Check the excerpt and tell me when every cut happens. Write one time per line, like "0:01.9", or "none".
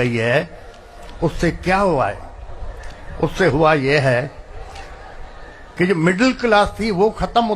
none